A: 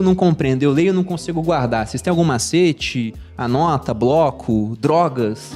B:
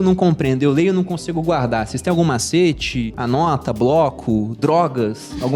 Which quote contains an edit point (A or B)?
B